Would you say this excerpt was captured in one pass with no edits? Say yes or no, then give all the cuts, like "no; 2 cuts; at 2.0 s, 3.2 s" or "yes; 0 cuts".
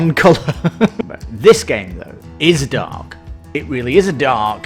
no; 1 cut; at 0.9 s